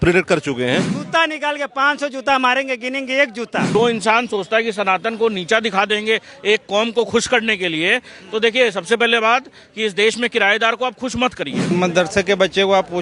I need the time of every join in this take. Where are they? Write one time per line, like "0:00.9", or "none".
0:00.9
0:03.8
0:11.7